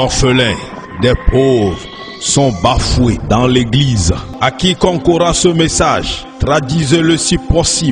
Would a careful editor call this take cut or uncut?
cut